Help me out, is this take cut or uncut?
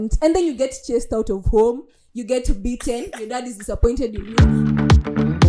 cut